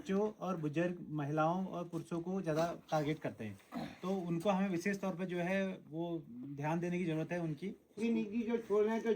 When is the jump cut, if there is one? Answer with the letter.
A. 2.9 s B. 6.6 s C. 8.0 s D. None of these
C